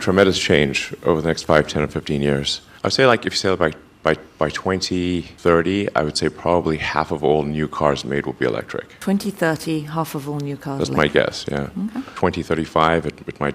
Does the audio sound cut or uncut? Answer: uncut